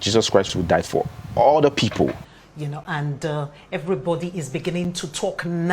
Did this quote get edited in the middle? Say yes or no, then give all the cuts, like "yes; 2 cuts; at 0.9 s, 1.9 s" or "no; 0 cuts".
yes; 1 cut; at 2.3 s